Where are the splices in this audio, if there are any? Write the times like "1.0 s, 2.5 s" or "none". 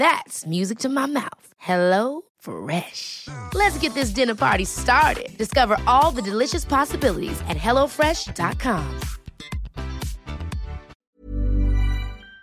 10.9 s

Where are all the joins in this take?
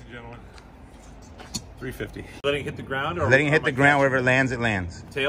2.4 s

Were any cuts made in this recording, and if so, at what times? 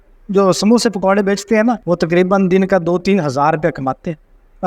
1.8 s

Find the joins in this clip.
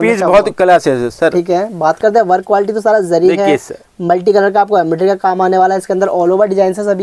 none

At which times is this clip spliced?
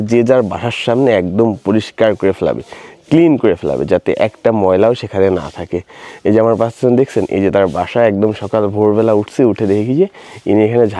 none

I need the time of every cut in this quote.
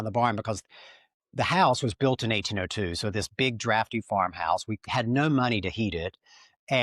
4.8 s

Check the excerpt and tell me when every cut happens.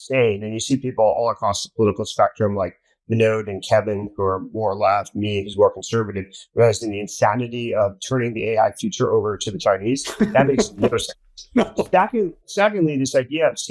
none

